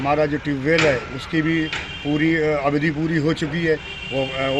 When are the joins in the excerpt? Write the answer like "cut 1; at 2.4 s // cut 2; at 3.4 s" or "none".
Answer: none